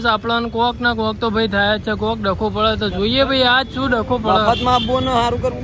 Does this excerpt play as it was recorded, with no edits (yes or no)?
yes